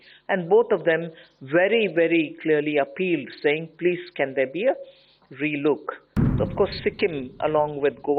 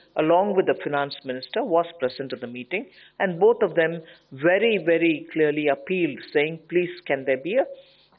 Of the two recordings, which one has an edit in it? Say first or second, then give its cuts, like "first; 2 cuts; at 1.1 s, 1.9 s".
first; 1 cut; at 6.3 s